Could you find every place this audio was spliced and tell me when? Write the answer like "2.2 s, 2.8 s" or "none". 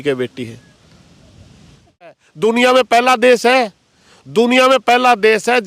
2.2 s